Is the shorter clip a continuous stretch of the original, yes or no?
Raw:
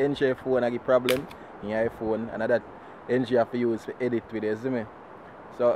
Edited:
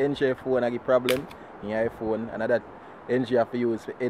yes